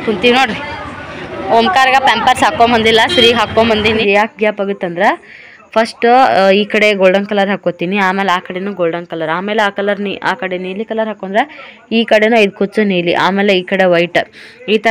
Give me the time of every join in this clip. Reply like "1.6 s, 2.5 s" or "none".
4.0 s